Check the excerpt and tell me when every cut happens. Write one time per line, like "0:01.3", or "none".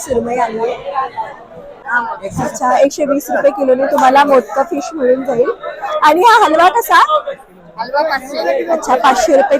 0:01.9